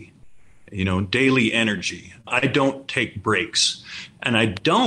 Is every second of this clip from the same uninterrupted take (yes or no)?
no